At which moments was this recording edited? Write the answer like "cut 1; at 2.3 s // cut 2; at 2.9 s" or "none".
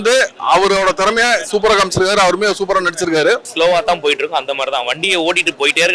cut 1; at 3.5 s

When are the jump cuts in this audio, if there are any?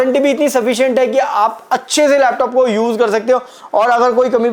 none

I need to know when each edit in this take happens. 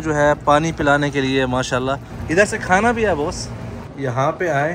cut 1; at 2.1 s // cut 2; at 3.9 s

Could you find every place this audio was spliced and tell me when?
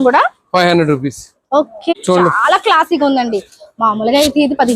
cut 1; at 1.9 s

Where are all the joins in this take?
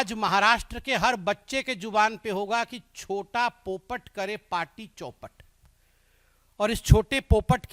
none

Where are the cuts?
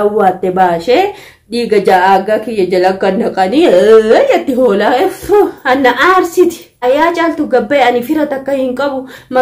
cut 1; at 6.8 s

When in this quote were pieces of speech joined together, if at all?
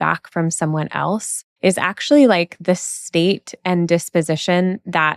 cut 1; at 1.4 s

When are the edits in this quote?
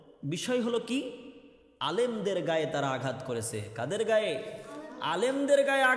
none

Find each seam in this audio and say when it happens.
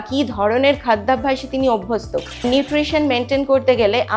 cut 1; at 2.4 s

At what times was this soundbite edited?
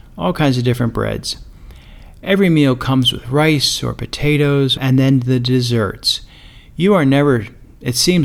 cut 1; at 4.8 s

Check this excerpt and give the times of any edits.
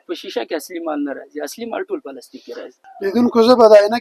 cut 1; at 2.8 s

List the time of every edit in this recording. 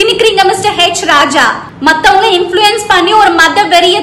cut 1; at 1.7 s

